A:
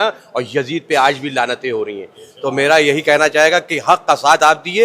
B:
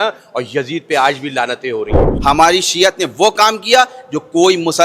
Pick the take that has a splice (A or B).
B